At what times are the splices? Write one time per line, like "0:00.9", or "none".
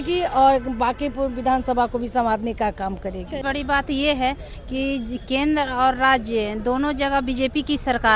0:03.4